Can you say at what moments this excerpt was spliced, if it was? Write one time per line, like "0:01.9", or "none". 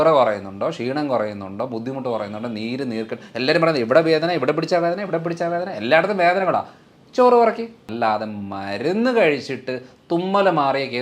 0:07.8